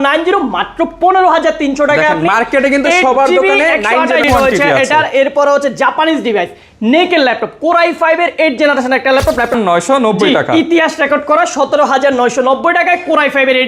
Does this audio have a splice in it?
yes; 2 cuts; at 4.2 s, 9.6 s

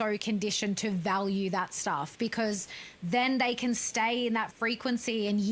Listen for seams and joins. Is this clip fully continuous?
yes; 0 cuts

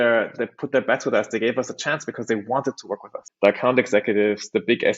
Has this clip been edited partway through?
yes; 1 cut; at 3.2 s

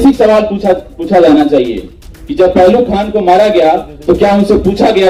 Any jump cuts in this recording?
no; 0 cuts

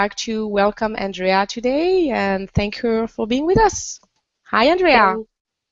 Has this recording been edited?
yes; 1 cut; at 3.9 s

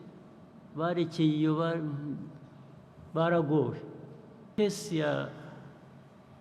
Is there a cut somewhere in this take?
yes; 1 cut; at 4.5 s

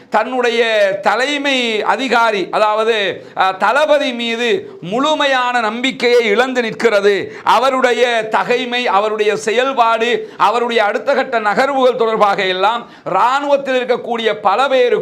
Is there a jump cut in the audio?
no; 0 cuts

